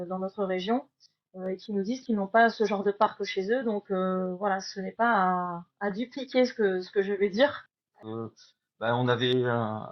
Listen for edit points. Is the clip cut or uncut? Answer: cut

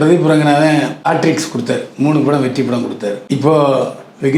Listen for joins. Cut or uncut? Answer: cut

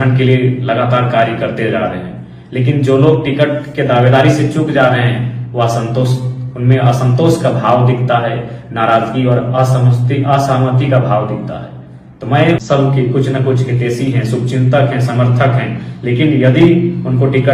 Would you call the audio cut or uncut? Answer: cut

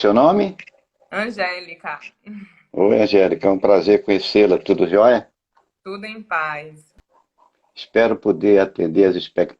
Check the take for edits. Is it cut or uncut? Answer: cut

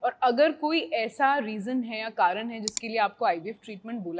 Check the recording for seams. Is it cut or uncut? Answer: uncut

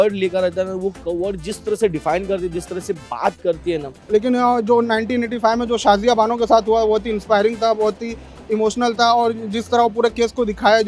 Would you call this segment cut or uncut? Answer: cut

